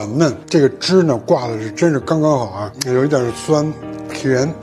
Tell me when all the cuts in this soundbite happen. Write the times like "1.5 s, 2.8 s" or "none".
none